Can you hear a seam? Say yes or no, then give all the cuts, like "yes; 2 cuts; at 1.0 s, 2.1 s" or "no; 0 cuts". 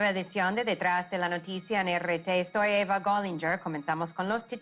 no; 0 cuts